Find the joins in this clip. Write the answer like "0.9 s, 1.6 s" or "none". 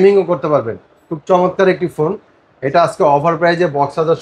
none